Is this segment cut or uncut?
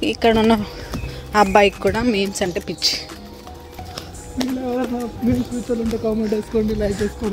uncut